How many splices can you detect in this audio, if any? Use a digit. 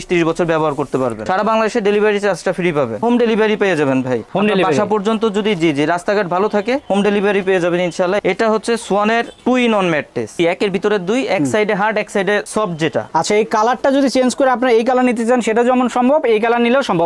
5